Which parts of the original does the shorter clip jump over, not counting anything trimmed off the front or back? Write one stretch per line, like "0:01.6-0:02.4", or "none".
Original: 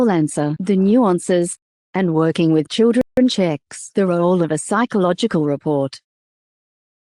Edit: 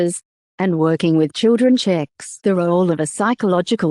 0:03.0-0:03.2